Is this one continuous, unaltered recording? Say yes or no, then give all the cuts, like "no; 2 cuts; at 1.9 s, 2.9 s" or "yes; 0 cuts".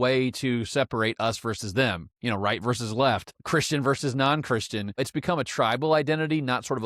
no; 2 cuts; at 3.4 s, 5.0 s